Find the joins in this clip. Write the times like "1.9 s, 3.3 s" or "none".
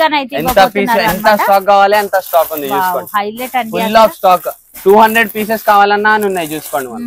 none